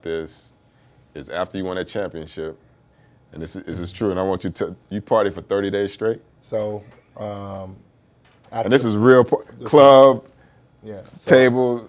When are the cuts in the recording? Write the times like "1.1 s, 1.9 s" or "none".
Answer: 6.4 s